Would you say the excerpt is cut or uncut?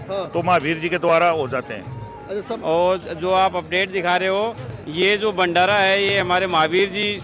cut